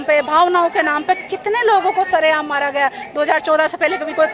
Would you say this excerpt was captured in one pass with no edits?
yes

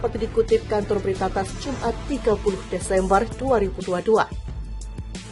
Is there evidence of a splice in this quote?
no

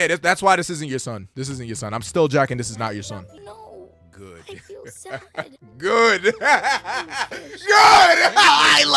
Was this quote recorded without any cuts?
no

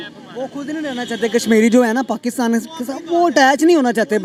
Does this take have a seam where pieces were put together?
no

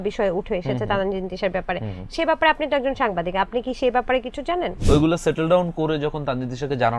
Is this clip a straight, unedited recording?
no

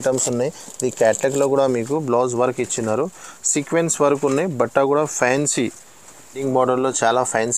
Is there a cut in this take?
yes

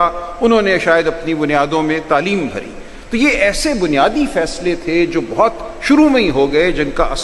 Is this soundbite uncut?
yes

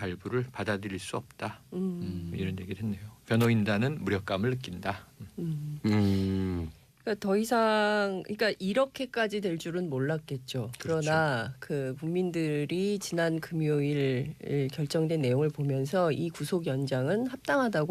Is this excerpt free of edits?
no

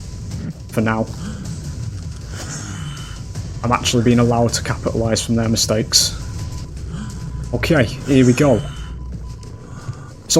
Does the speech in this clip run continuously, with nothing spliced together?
no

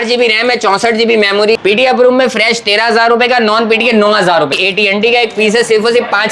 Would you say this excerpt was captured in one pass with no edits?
no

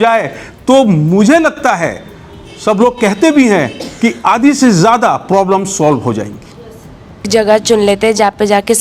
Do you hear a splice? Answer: yes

